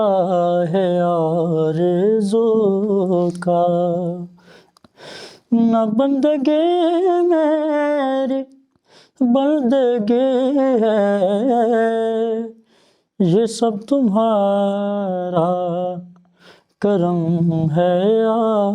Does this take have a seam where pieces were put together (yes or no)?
no